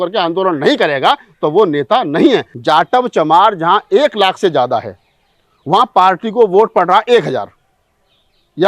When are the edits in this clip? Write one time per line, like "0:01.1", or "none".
0:02.5

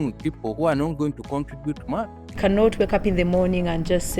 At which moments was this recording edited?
0:02.4

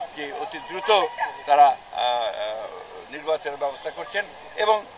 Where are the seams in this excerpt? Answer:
none

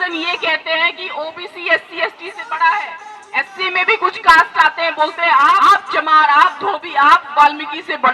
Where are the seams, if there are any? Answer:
0:05.6

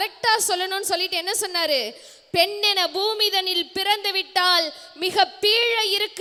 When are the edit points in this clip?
none

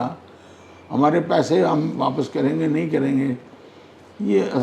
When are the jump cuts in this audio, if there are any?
none

